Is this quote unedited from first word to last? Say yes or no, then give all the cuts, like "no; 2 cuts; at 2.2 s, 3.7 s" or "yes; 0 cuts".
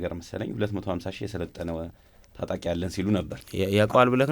no; 1 cut; at 3.4 s